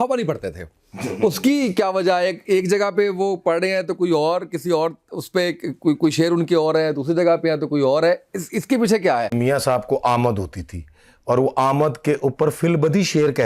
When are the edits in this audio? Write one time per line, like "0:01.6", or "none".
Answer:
0:09.3